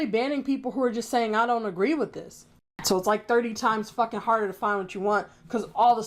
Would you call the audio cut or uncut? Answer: cut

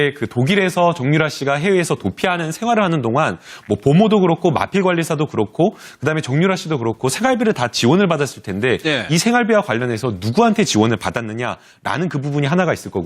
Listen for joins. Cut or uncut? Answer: cut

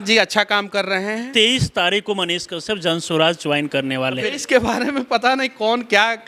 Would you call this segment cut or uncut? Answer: cut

